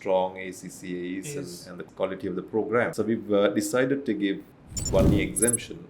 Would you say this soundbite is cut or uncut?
cut